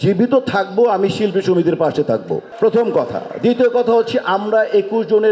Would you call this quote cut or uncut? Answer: uncut